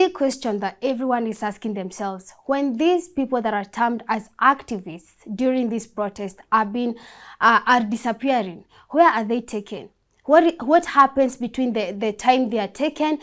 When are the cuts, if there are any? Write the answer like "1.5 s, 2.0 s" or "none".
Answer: none